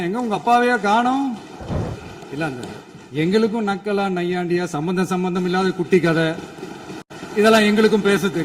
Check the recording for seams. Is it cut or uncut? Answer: cut